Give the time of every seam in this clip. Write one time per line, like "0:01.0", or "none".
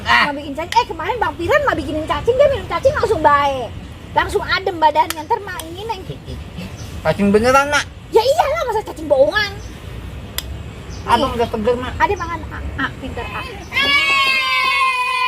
0:13.6